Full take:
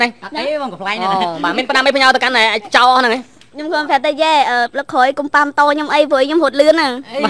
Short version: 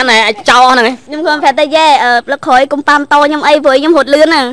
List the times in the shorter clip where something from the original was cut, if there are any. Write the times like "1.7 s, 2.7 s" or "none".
1.1 s